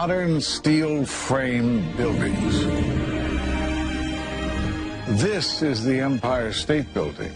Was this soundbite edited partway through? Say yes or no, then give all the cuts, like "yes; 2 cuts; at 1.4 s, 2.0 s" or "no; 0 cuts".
yes; 1 cut; at 1.9 s